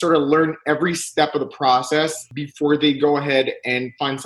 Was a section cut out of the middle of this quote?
yes; 1 cut; at 2.3 s

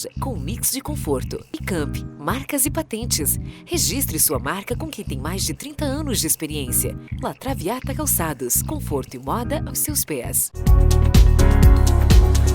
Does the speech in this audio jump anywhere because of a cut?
yes; 1 cut; at 10.4 s

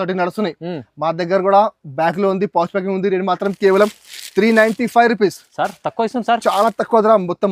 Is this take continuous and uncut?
yes; 0 cuts

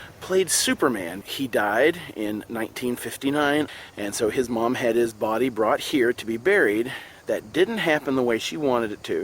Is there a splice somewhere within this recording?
yes; 2 cuts; at 1.1 s, 3.7 s

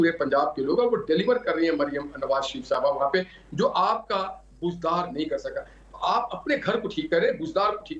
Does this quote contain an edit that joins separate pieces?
no; 0 cuts

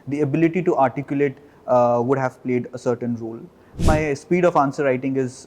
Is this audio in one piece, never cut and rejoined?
no; 1 cut; at 3.8 s

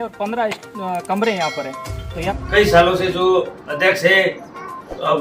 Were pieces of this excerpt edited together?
yes; 1 cut; at 2.0 s

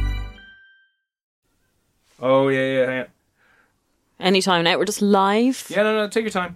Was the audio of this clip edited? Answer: no; 0 cuts

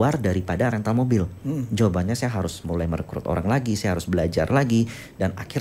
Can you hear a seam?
no; 0 cuts

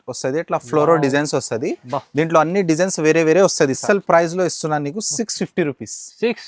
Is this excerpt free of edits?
no; 1 cut; at 3.8 s

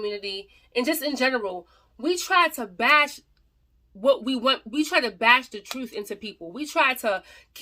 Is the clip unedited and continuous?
yes; 0 cuts

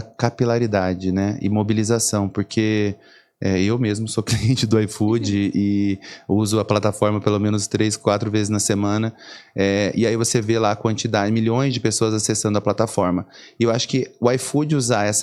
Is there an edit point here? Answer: no; 0 cuts

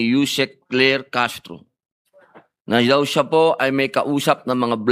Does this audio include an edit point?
no; 0 cuts

